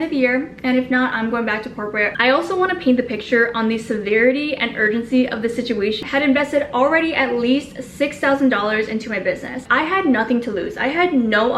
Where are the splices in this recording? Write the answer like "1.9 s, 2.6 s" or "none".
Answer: 2.1 s, 6.0 s, 9.6 s